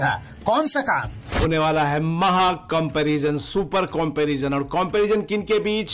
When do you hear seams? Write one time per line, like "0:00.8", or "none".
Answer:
0:01.4